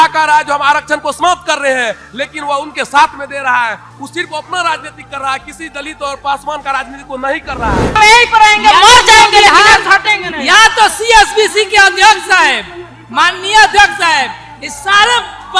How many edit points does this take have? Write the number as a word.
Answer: one